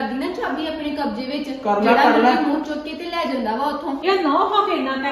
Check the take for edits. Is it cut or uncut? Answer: cut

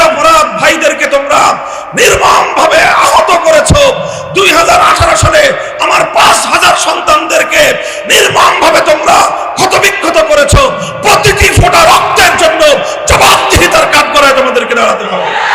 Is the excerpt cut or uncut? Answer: uncut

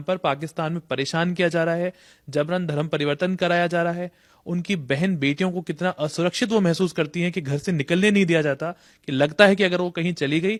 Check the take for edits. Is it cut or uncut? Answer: uncut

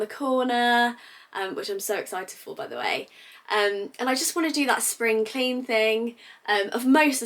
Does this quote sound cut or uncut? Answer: uncut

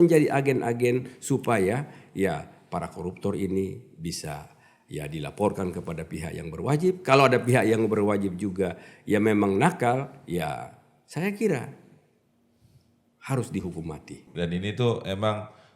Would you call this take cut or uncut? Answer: cut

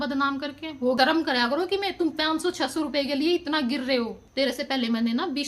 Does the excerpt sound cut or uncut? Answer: cut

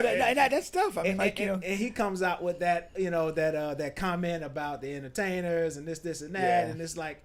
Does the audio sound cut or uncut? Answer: uncut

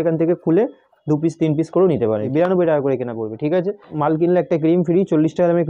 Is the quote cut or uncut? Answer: cut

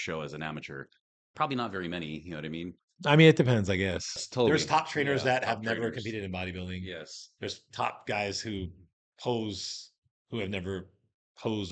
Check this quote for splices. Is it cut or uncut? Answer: cut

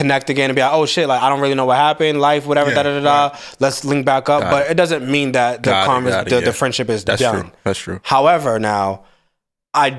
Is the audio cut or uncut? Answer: uncut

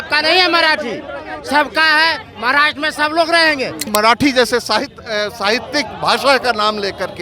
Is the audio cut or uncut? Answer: cut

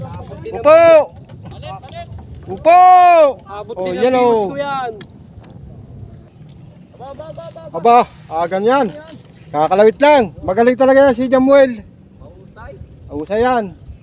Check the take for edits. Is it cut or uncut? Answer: cut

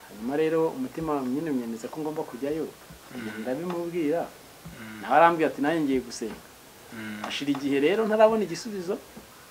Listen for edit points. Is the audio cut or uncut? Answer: uncut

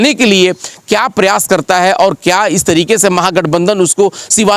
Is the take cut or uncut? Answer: uncut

